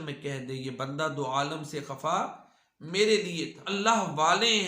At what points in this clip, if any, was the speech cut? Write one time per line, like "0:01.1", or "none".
0:03.7

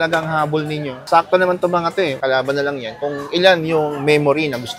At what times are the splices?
none

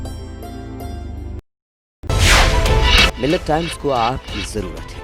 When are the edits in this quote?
0:01.4

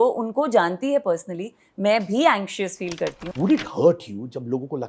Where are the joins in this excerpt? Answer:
0:03.2

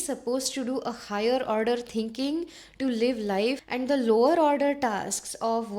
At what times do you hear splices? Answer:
0:03.7

